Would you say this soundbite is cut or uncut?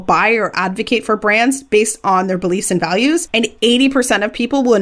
cut